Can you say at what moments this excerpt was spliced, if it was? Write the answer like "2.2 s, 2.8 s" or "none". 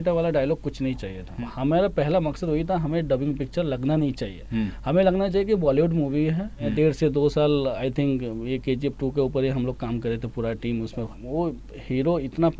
1.3 s, 6.7 s, 11.2 s